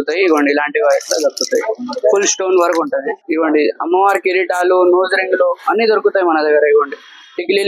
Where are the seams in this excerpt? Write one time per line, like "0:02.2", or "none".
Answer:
0:03.2